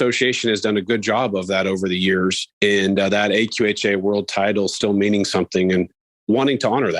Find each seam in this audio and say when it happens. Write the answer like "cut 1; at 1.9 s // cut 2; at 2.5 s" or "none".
cut 1; at 2.4 s // cut 2; at 6.0 s